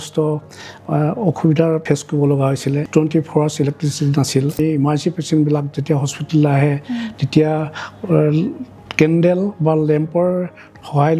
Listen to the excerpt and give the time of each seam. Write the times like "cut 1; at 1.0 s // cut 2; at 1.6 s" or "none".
cut 1; at 1.8 s // cut 2; at 2.8 s // cut 3; at 4.6 s